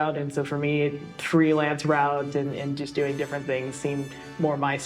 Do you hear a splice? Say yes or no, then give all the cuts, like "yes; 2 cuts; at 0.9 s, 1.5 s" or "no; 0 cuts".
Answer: no; 0 cuts